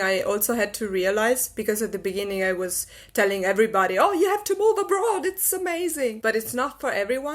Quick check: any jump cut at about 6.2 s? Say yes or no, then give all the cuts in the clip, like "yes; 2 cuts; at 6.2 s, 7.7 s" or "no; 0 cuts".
yes; 1 cut; at 6.2 s